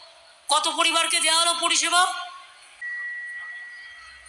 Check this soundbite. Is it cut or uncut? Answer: cut